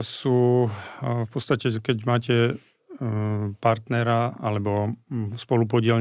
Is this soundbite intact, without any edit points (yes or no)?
yes